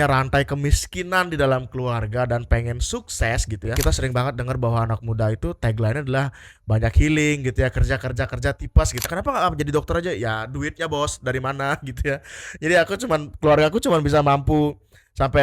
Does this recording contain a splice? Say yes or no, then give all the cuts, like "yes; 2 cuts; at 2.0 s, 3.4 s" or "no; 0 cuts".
yes; 2 cuts; at 3.7 s, 9.1 s